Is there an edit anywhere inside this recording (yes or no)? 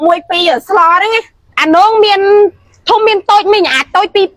yes